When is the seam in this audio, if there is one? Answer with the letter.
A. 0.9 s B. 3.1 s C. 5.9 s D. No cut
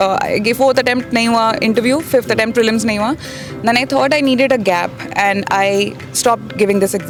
D